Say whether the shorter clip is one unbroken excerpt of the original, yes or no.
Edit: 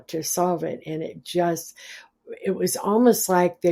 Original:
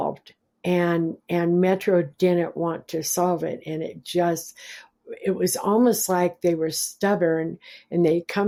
yes